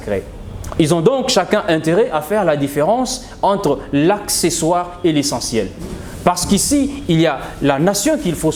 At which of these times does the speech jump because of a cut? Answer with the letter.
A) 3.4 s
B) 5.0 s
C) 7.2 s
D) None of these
D